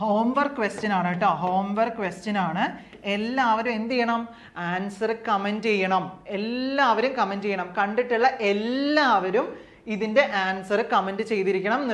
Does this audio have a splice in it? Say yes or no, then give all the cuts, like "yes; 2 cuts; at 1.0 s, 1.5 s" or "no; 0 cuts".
no; 0 cuts